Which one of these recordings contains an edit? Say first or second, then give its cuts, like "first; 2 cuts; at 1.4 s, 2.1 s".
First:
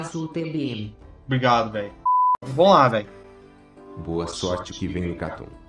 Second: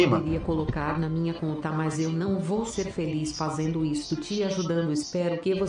first; 1 cut; at 2.3 s